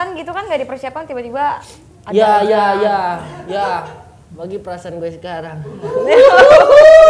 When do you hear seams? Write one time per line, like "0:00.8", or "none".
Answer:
none